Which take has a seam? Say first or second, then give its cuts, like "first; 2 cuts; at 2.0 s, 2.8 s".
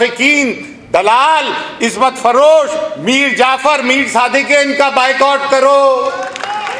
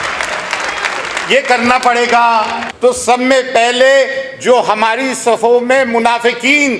second; 1 cut; at 2.6 s